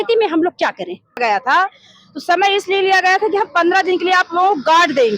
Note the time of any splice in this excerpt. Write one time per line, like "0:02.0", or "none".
0:01.2